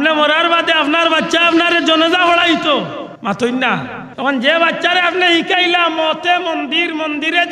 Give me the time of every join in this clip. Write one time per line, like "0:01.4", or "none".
0:03.1
0:04.0